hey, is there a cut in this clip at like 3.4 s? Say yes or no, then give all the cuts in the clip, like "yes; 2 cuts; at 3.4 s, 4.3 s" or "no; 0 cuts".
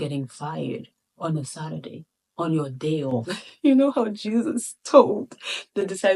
yes; 1 cut; at 3.4 s